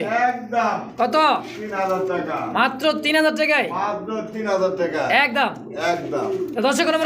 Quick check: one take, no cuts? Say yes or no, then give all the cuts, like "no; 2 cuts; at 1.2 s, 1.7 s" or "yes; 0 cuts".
yes; 0 cuts